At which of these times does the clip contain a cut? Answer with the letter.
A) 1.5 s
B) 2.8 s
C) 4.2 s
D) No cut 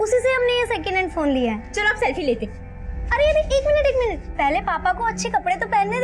C